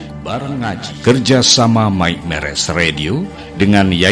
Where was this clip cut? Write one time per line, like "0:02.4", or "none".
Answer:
0:01.0